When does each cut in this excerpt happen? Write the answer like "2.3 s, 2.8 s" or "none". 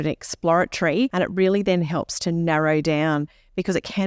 1.1 s